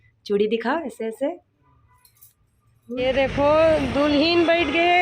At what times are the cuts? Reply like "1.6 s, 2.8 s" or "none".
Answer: 3.0 s